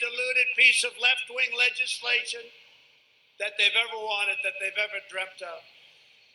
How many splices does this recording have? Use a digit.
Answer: 1